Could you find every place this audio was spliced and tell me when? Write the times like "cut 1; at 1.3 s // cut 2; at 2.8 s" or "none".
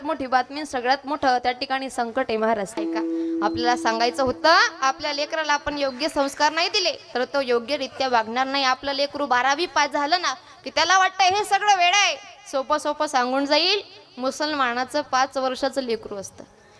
cut 1; at 2.8 s